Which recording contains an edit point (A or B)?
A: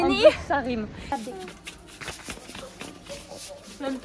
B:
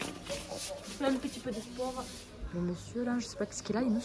A